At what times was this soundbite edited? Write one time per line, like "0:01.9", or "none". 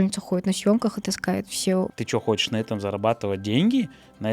0:01.9